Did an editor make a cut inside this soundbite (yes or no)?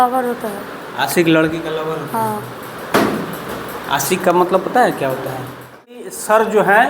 yes